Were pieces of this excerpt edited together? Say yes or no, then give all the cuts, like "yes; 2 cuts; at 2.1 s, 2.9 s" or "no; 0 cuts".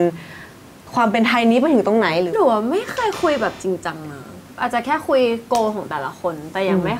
no; 0 cuts